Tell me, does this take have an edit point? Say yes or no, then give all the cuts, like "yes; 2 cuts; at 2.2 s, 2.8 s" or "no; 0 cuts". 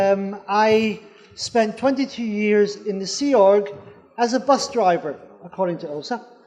yes; 1 cut; at 3.2 s